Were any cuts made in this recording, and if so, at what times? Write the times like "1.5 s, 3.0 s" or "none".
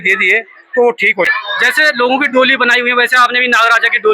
1.3 s